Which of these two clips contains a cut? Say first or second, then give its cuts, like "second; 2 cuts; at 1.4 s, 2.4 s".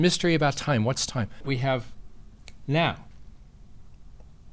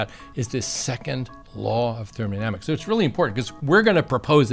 first; 1 cut; at 1.4 s